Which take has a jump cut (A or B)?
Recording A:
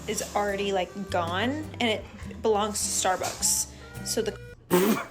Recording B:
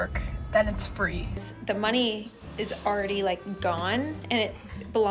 B